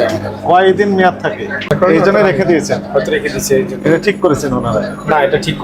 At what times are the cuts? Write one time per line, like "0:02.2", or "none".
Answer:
0:01.7